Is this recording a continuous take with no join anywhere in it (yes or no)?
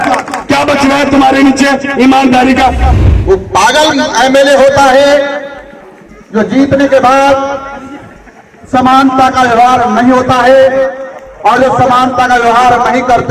no